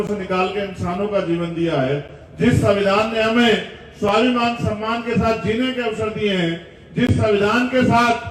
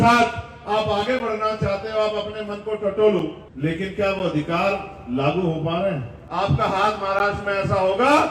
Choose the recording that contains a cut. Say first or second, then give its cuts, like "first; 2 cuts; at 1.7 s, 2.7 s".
second; 2 cuts; at 3.4 s, 6.1 s